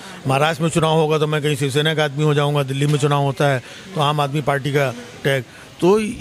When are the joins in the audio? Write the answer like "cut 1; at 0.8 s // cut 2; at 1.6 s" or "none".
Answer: none